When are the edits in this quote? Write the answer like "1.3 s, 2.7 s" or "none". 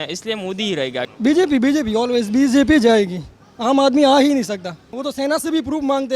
1.1 s, 4.9 s